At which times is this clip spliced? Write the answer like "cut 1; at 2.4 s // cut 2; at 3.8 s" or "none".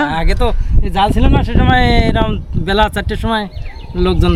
none